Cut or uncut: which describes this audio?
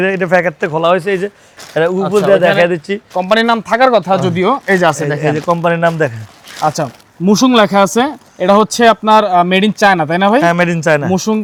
uncut